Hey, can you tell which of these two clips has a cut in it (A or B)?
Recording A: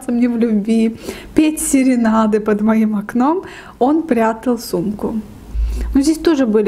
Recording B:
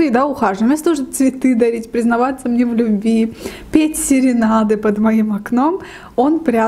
A